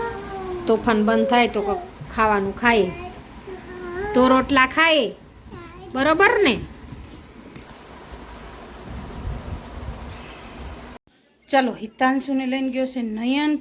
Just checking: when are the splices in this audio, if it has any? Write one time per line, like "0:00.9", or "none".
0:11.0